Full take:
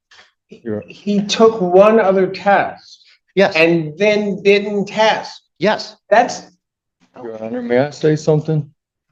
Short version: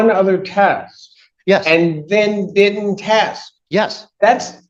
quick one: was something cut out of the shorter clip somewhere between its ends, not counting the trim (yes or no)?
no